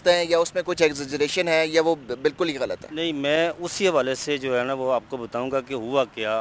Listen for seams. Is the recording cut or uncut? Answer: uncut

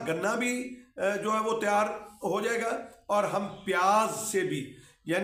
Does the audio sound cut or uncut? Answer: uncut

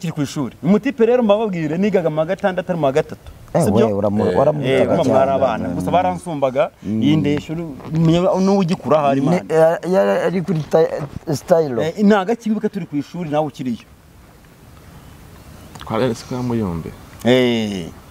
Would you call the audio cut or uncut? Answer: uncut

